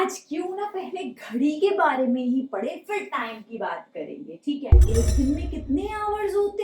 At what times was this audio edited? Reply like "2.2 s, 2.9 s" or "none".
4.8 s